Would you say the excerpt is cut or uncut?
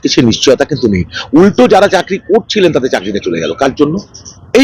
uncut